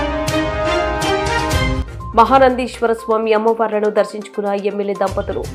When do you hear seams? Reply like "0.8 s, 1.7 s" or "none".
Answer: none